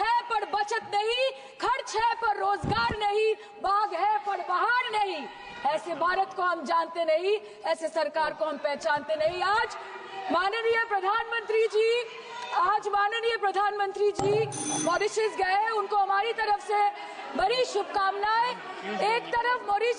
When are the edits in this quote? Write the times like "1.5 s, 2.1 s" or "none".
none